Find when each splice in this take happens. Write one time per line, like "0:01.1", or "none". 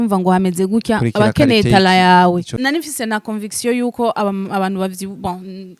0:02.5